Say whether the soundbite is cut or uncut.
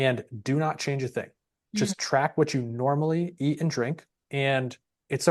uncut